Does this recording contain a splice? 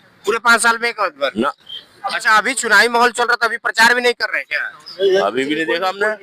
no; 0 cuts

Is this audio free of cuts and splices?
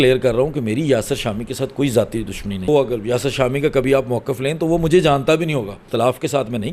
no; 2 cuts; at 2.7 s, 5.9 s

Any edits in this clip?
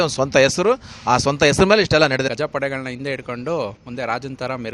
yes; 1 cut; at 2.3 s

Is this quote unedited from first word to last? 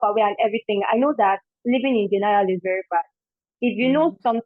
yes; 0 cuts

